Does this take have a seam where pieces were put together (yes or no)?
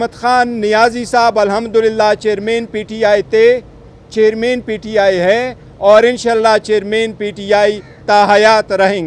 no